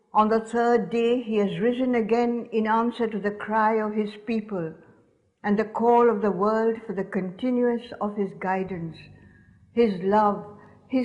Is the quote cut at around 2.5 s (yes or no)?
yes